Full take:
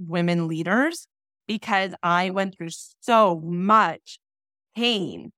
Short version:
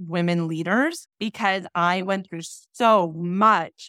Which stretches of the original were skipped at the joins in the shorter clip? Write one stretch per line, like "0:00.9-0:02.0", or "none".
0:01.1-0:01.4